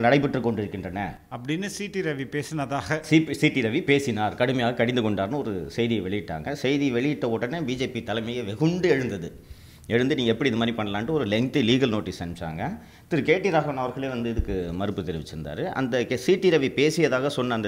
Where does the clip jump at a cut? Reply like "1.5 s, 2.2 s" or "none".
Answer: none